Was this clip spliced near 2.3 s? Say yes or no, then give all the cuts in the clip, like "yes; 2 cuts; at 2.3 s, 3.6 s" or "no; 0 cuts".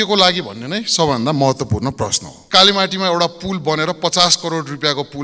yes; 1 cut; at 2.3 s